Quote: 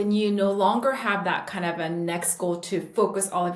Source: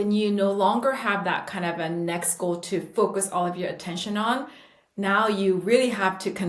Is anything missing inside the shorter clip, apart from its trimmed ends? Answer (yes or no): no